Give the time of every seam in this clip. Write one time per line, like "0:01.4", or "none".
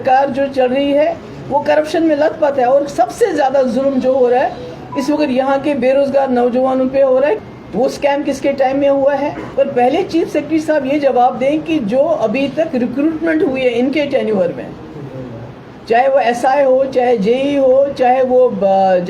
0:07.4
0:09.4